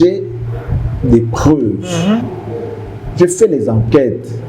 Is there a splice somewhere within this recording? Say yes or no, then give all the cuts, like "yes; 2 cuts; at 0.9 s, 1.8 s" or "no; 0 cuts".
no; 0 cuts